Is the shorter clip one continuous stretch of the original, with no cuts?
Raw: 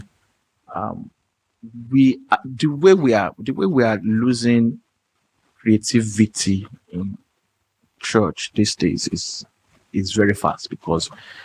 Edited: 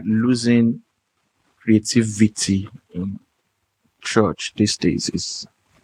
yes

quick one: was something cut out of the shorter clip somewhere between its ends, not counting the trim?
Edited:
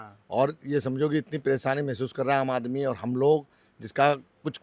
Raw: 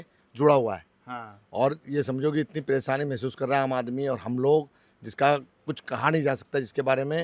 no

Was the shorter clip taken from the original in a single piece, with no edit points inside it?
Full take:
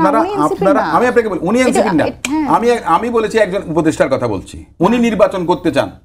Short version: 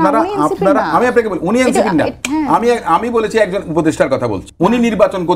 no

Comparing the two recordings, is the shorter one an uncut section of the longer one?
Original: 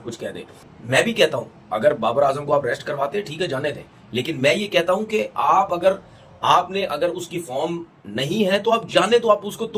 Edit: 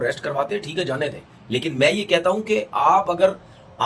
yes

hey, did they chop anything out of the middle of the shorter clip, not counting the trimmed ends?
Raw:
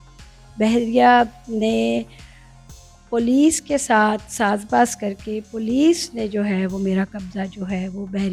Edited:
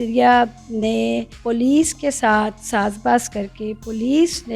yes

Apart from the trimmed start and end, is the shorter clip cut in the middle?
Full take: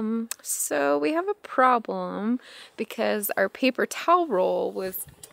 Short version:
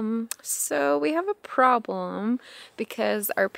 no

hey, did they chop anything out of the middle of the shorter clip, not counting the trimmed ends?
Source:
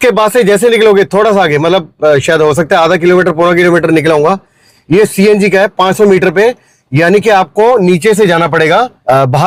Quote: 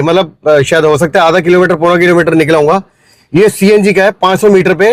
no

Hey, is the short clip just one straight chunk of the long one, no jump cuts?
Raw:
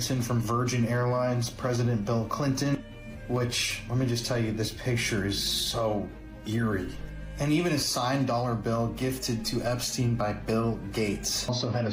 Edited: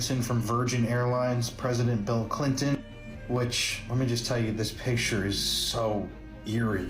yes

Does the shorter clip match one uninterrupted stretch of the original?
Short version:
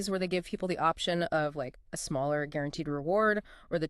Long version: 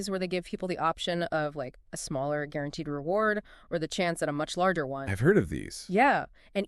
yes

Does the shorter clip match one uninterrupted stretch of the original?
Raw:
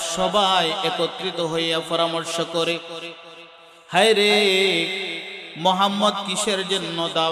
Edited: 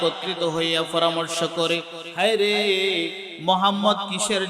no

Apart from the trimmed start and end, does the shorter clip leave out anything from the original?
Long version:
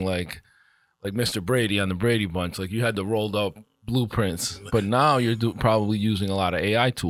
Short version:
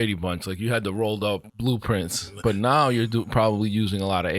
yes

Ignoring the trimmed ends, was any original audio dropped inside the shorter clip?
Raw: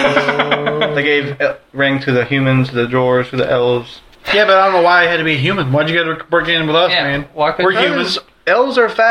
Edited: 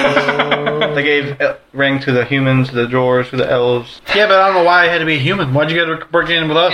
yes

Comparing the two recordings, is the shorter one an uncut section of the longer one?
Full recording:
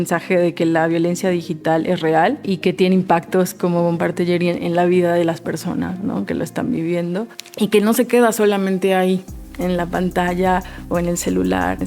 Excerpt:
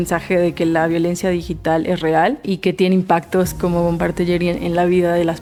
yes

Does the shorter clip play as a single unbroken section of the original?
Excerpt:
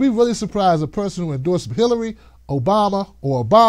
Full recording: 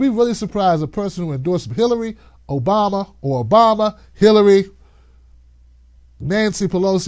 yes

